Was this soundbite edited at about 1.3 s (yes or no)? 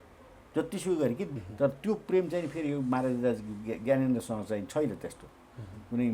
yes